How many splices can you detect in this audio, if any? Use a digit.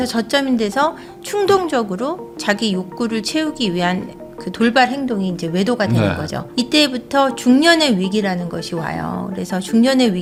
0